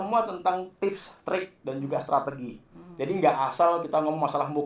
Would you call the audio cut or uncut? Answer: uncut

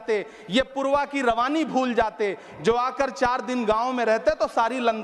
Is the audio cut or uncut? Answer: uncut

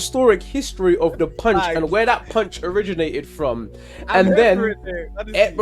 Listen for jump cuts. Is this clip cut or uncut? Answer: uncut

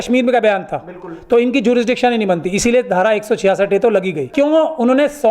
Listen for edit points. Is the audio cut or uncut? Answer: cut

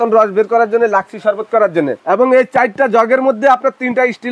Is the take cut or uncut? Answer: cut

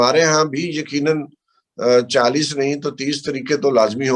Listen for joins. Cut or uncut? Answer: uncut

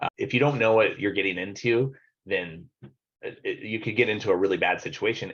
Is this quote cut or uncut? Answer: uncut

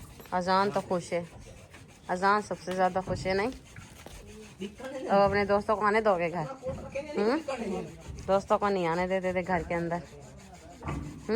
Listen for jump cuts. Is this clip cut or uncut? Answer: uncut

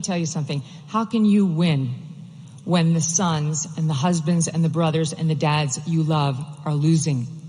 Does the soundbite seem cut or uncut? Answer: uncut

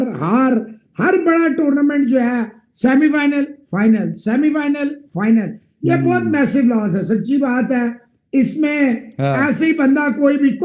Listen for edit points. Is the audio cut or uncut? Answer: uncut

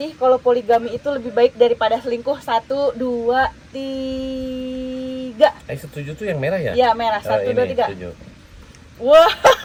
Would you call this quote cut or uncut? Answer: uncut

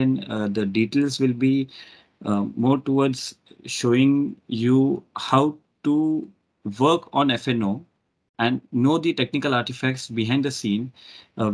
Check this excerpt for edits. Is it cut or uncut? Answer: uncut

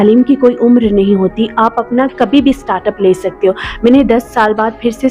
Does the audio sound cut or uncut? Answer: uncut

